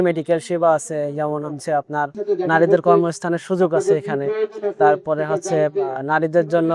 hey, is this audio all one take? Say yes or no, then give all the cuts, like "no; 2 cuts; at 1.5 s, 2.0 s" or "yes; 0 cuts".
yes; 0 cuts